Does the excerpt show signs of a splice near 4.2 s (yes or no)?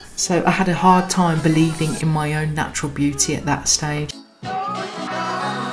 yes